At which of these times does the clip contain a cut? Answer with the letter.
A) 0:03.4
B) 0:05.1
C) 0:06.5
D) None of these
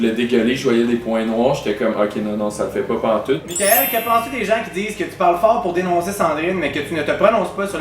A